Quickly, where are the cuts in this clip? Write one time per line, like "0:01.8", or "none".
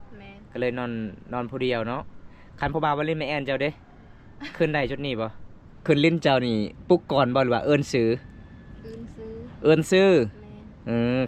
0:05.7